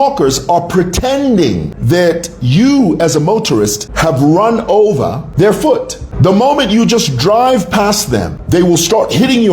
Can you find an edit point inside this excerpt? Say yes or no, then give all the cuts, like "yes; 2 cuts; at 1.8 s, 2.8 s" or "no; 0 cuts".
yes; 5 cuts; at 1.7 s, 3.8 s, 5.2 s, 6.0 s, 8.4 s